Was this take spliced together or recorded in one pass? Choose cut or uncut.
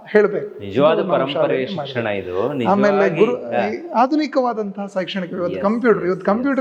uncut